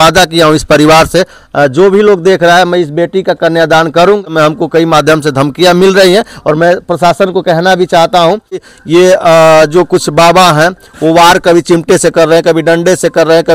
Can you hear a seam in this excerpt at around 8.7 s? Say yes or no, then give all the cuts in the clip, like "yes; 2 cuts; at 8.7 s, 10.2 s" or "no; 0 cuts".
yes; 2 cuts; at 4.2 s, 8.7 s